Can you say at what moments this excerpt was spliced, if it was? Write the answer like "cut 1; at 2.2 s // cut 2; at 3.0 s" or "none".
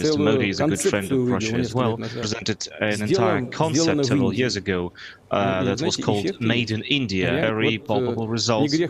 cut 1; at 2.3 s // cut 2; at 7.4 s